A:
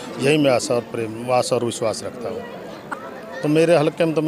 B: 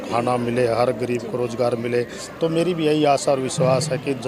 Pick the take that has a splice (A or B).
A